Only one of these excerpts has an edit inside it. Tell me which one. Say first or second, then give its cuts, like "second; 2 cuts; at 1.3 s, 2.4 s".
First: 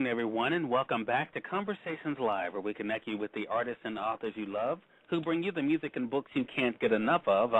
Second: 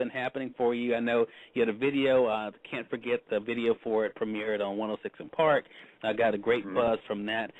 first; 1 cut; at 3.3 s